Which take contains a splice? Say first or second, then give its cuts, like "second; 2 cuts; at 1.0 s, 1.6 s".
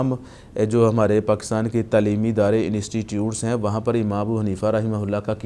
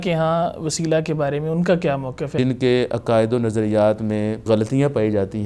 second; 2 cuts; at 2.3 s, 4.4 s